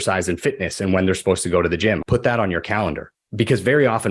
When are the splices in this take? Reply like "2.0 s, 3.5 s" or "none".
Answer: 2.0 s, 3.2 s